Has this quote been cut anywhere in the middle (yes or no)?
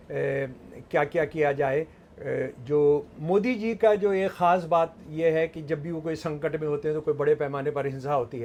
no